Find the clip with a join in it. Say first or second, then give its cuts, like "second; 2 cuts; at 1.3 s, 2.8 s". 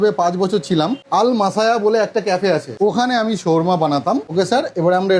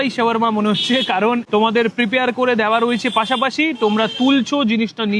first; 1 cut; at 1.0 s